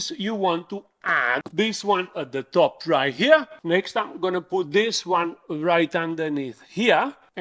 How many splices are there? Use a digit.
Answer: 1